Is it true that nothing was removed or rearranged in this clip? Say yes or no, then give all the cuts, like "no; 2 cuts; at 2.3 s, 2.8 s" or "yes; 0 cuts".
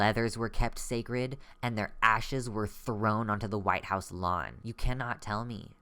no; 1 cut; at 4.6 s